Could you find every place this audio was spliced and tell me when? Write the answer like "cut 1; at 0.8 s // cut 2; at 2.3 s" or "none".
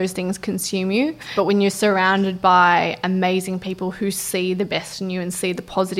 cut 1; at 1.3 s